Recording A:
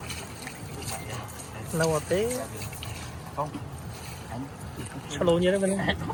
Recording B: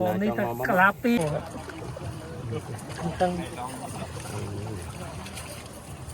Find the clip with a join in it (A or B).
B